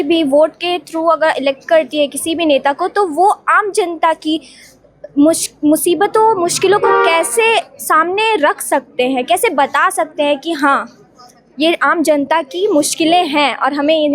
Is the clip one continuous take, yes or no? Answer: yes